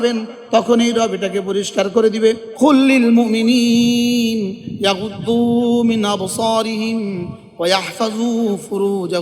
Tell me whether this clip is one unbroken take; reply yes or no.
no